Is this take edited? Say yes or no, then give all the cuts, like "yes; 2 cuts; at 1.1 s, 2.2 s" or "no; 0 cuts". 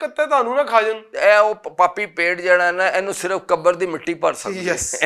yes; 1 cut; at 1.1 s